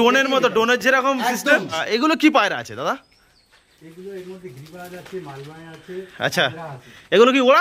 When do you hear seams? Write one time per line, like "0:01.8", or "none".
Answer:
0:01.8